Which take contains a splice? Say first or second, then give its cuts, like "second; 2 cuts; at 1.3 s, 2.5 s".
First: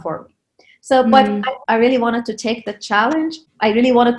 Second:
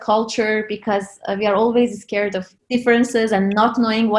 first; 1 cut; at 1.6 s